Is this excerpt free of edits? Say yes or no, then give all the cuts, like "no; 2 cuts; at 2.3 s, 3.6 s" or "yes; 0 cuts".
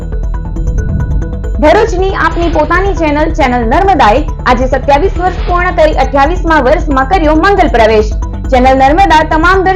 yes; 0 cuts